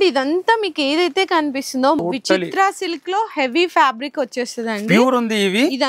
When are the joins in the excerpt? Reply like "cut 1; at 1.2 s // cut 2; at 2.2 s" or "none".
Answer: cut 1; at 2.0 s